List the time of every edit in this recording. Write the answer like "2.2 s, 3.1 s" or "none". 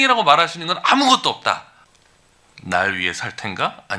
1.8 s